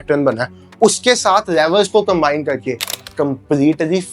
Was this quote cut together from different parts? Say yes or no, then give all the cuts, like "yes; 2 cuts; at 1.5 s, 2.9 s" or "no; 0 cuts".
yes; 1 cut; at 2.9 s